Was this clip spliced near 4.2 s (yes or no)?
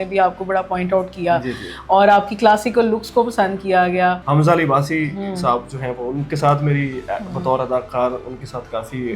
yes